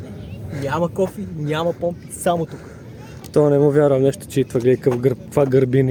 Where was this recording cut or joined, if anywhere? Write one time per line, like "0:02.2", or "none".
none